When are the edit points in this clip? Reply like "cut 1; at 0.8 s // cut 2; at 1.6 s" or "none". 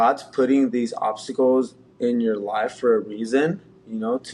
none